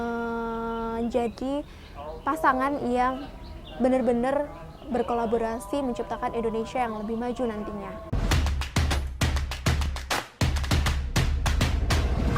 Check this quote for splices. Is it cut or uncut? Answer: cut